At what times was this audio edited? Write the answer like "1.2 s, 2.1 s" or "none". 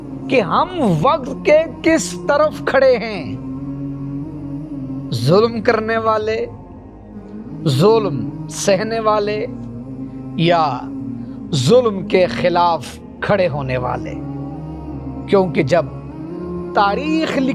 none